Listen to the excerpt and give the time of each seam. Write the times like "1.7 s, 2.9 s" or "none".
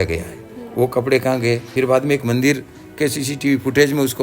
1.7 s